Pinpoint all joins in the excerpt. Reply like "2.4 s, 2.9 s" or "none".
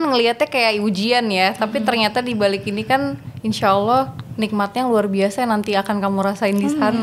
none